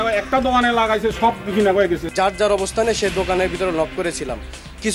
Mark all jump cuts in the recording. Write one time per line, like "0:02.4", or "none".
0:02.1